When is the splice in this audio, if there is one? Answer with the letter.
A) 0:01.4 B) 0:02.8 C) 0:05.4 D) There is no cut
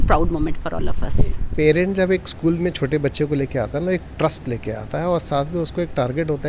A